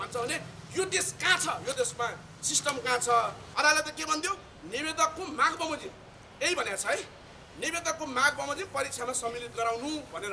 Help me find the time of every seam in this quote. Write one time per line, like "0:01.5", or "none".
0:03.4

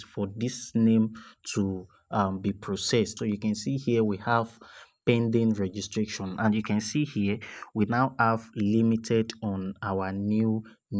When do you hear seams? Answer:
0:03.1

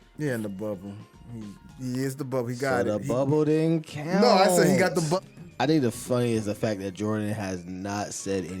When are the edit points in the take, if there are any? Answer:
0:05.2

